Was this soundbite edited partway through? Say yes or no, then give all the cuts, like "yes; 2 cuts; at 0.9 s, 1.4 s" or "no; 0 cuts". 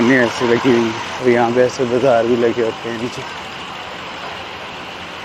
yes; 1 cut; at 1.1 s